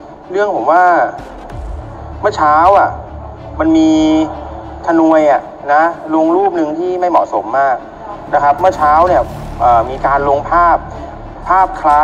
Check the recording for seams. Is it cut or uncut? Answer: uncut